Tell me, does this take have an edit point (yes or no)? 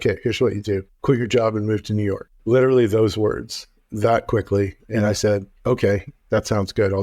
yes